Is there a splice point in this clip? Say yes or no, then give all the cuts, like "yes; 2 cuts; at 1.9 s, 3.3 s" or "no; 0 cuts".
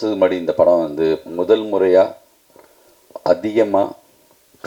no; 0 cuts